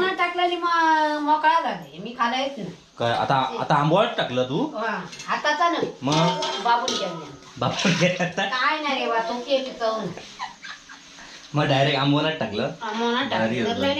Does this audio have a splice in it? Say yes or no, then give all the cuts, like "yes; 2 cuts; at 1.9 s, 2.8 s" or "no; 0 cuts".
no; 0 cuts